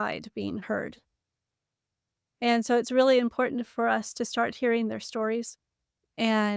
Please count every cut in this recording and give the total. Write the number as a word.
zero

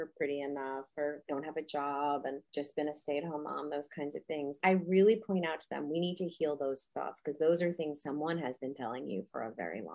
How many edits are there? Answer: four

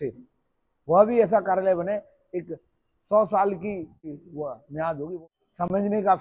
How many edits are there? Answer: two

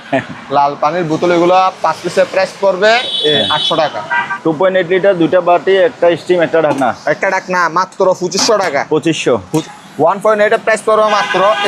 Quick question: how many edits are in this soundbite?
two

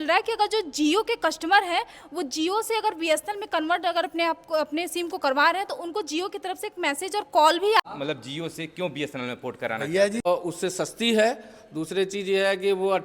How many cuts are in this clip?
two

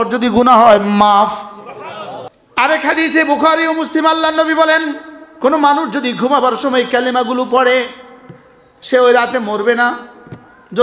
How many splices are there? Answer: one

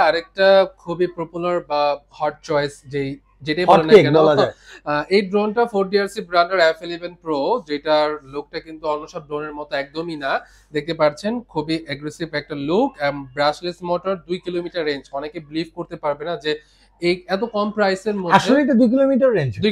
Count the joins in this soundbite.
zero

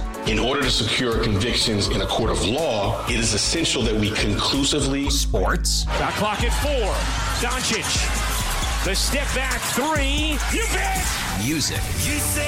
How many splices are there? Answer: zero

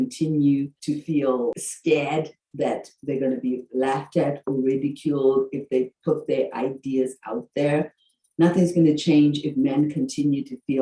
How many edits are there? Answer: one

